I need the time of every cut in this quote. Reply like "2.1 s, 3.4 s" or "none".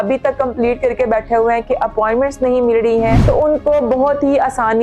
3.2 s